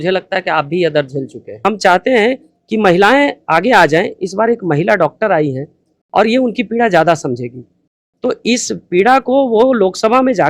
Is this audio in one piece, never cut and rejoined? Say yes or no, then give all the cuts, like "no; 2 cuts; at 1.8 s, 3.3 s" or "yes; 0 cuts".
no; 1 cut; at 1.6 s